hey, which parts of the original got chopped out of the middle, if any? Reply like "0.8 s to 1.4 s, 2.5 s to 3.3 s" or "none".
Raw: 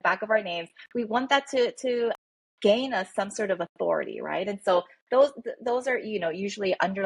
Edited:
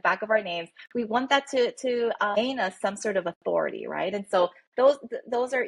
2.4 s to 2.7 s